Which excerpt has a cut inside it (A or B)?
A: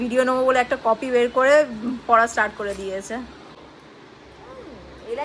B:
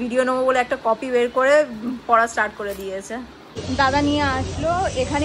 B